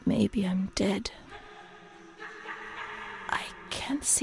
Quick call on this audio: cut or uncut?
uncut